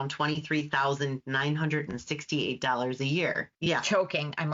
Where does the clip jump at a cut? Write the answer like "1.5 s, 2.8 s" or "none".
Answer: 3.5 s